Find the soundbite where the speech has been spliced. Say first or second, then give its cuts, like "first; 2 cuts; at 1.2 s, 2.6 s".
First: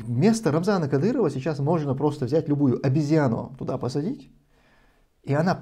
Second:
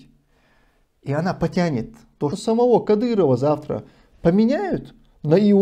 second; 1 cut; at 2.4 s